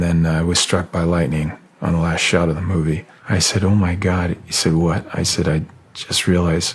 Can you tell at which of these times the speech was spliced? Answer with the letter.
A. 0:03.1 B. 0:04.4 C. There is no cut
A